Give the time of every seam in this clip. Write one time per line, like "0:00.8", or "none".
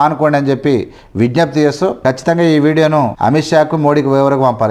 none

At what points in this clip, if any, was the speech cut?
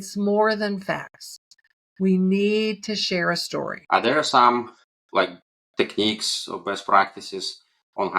0:03.8

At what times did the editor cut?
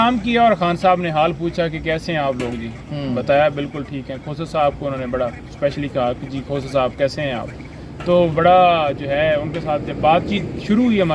none

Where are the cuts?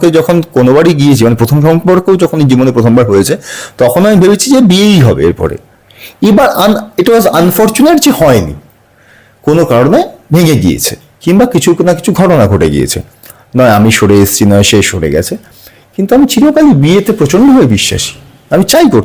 none

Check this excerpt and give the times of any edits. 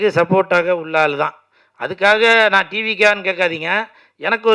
none

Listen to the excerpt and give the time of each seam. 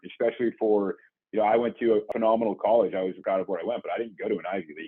0:02.1
0:03.2

